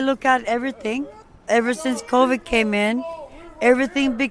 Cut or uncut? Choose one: cut